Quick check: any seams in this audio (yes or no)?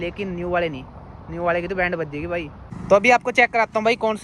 yes